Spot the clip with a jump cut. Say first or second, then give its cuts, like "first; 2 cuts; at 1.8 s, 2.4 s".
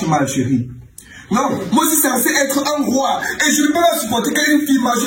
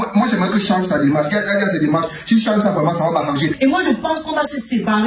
second; 1 cut; at 3.6 s